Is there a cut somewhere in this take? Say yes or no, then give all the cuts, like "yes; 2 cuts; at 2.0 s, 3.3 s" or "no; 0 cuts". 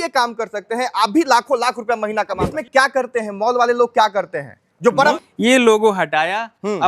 yes; 2 cuts; at 2.4 s, 5.1 s